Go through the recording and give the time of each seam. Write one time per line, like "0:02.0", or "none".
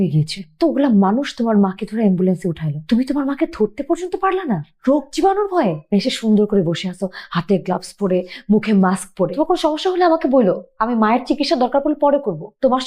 0:05.9